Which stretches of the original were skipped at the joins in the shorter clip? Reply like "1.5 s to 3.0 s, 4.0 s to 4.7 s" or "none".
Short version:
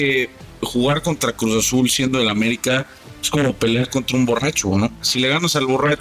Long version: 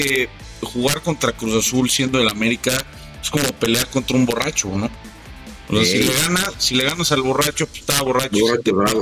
5.0 s to 6.6 s